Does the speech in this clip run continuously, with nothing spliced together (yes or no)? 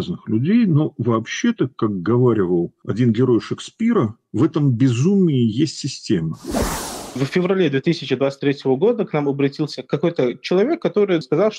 no